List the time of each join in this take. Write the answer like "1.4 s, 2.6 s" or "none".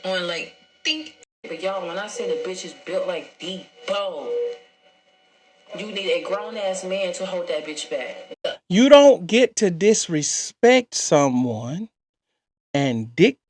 1.5 s, 8.4 s